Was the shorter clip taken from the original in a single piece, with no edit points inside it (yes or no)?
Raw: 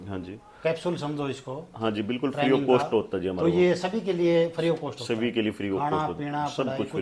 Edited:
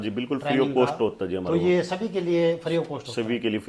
yes